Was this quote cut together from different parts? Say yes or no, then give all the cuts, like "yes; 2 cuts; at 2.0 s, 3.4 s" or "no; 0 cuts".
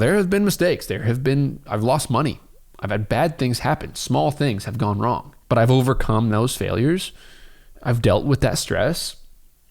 no; 0 cuts